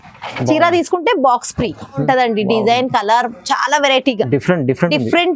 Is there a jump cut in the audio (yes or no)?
yes